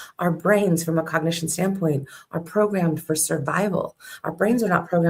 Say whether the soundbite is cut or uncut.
uncut